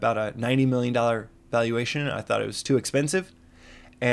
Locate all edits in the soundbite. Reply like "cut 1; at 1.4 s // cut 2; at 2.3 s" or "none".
cut 1; at 2.6 s